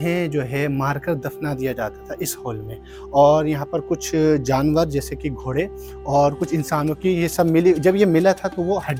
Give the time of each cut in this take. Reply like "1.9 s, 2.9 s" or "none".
none